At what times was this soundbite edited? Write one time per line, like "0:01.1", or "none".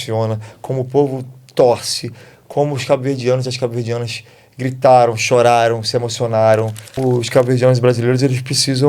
0:07.0

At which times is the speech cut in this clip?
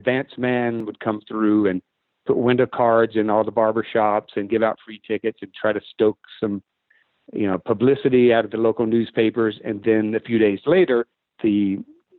0:00.9
0:11.2

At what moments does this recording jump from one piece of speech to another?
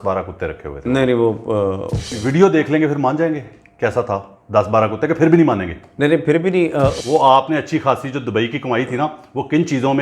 0:02.2
0:07.0

